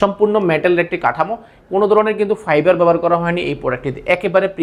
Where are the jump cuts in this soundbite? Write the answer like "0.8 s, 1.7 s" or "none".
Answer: none